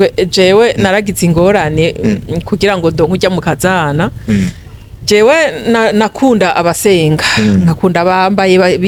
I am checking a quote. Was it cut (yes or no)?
no